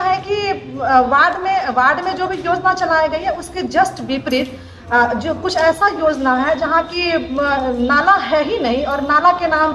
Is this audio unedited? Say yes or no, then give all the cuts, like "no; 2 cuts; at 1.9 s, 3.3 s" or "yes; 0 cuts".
yes; 0 cuts